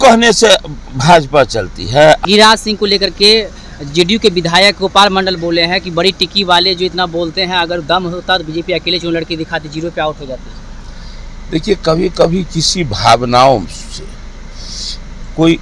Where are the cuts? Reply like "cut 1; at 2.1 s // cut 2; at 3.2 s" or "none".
cut 1; at 2.2 s